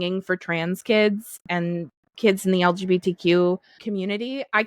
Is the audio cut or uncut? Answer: cut